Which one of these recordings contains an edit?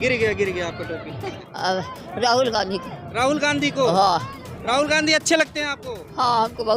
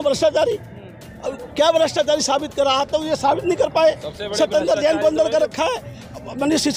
first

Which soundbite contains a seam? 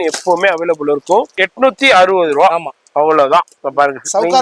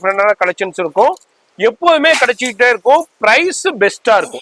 first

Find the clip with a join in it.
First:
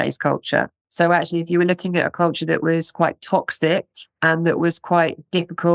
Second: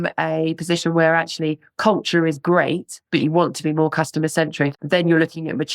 second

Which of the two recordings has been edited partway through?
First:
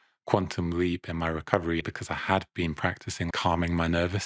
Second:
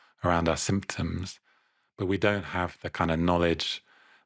first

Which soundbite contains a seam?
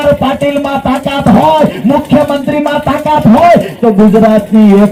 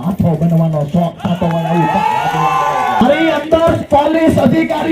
second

